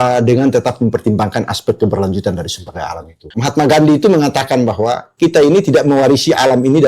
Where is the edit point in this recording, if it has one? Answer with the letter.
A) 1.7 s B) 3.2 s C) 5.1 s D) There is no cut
B